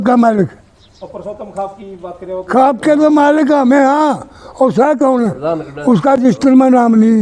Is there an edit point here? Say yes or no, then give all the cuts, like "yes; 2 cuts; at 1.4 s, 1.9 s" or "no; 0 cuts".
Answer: no; 0 cuts